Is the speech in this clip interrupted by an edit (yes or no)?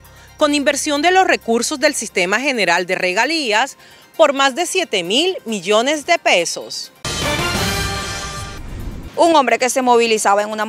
yes